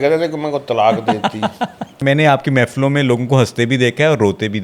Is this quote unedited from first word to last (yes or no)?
no